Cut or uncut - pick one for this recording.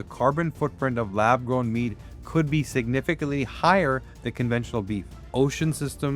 cut